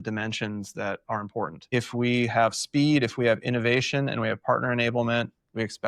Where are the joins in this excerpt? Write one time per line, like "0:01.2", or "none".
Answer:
0:01.6